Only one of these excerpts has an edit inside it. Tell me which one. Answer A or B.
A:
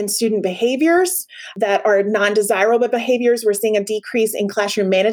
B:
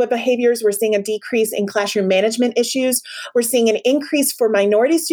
A